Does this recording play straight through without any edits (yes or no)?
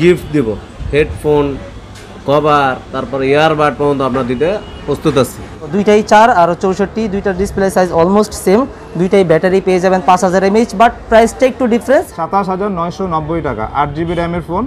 no